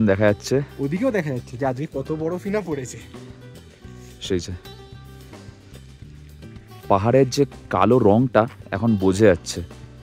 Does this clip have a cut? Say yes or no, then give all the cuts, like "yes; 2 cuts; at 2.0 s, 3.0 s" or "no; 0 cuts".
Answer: no; 0 cuts